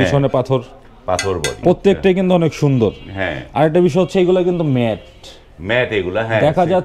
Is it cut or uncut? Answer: cut